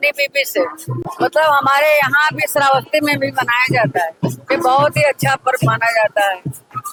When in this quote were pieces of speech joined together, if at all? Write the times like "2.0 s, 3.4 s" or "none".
none